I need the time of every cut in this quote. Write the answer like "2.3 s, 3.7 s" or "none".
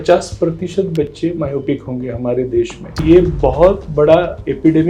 3.0 s